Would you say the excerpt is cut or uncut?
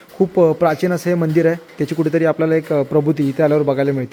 uncut